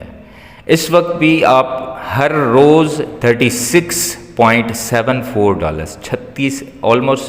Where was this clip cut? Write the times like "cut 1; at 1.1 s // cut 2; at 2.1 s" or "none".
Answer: cut 1; at 3.1 s

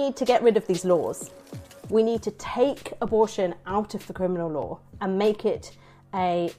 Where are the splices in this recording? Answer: cut 1; at 1.4 s

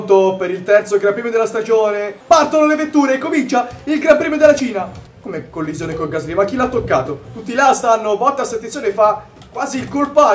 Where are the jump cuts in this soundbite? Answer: cut 1; at 2.1 s // cut 2; at 4.8 s // cut 3; at 7.2 s

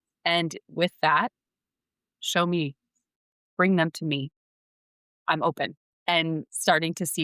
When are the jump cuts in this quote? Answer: none

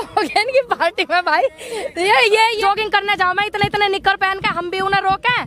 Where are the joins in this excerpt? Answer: cut 1; at 2.6 s

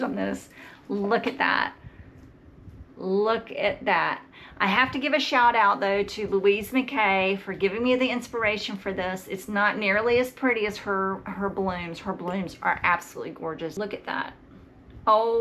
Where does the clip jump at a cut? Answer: cut 1; at 13.7 s

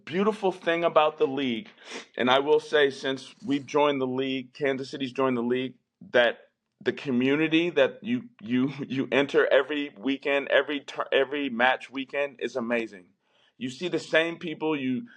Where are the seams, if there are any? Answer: none

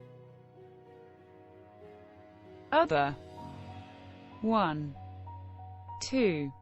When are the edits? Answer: cut 1; at 0.9 s

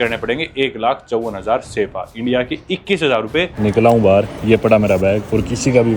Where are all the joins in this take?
cut 1; at 3.5 s

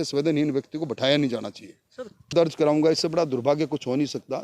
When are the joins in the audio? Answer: cut 1; at 2.3 s

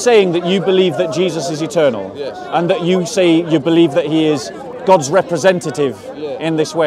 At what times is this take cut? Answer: cut 1; at 4.6 s

